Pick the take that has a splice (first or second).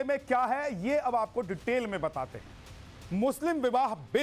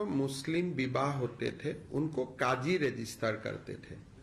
second